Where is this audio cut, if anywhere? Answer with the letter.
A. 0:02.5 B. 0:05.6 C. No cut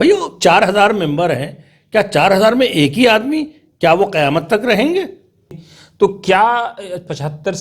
B